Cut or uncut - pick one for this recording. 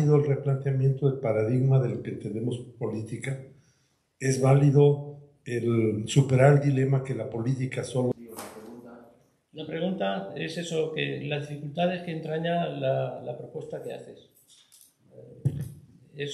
cut